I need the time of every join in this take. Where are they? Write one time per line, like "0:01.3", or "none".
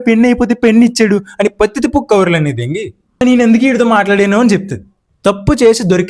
0:05.1